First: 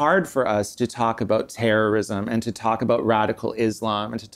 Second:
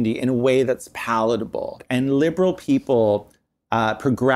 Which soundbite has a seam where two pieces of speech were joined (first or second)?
second